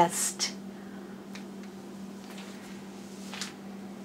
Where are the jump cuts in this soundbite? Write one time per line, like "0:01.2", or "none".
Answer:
none